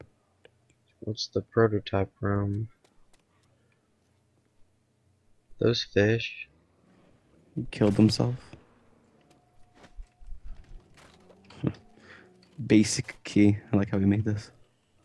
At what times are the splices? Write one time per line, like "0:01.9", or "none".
0:04.0